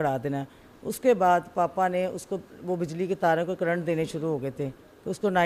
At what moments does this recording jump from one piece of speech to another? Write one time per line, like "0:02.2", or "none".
none